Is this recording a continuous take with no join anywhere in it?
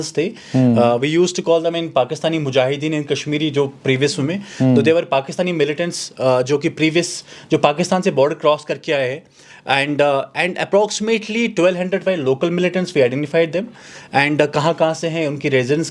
yes; 0 cuts

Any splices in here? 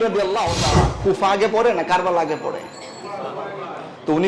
yes; 1 cut; at 0.9 s

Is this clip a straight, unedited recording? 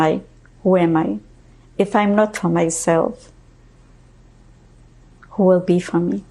yes; 0 cuts

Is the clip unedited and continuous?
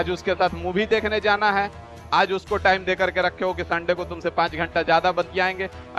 yes; 0 cuts

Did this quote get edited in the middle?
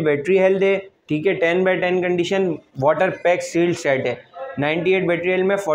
no; 0 cuts

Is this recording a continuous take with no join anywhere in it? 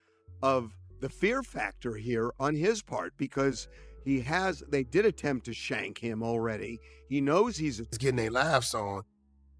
no; 1 cut; at 7.9 s

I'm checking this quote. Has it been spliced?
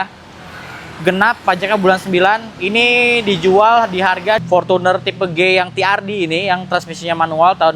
yes; 1 cut; at 4.4 s

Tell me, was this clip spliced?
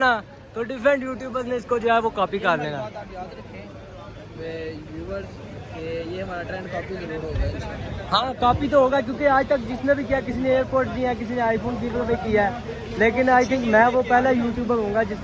no; 0 cuts

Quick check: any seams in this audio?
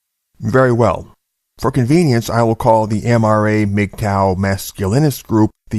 yes; 1 cut; at 4.7 s

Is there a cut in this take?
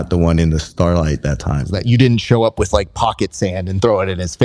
yes; 1 cut; at 1.8 s

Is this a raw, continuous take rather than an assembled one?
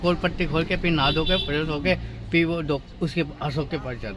yes; 0 cuts

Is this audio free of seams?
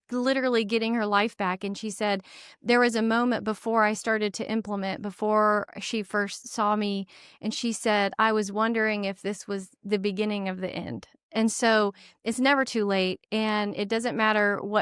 yes; 0 cuts

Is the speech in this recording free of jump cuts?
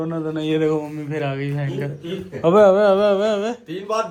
yes; 0 cuts

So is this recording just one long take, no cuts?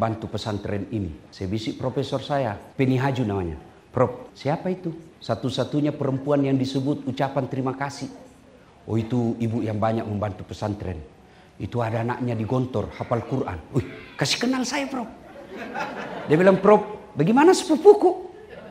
no; 3 cuts; at 1.2 s, 2.6 s, 4.7 s

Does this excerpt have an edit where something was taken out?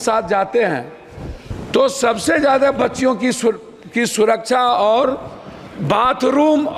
no; 0 cuts

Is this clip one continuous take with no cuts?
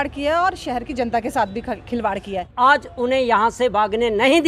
no; 1 cut; at 2.5 s

